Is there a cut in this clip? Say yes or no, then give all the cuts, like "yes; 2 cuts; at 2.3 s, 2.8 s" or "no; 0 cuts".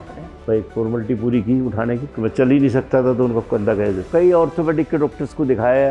yes; 2 cuts; at 2.1 s, 4.0 s